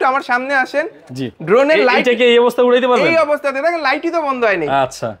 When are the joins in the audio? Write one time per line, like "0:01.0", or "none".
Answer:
none